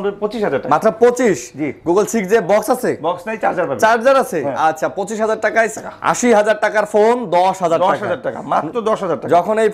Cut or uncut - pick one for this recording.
cut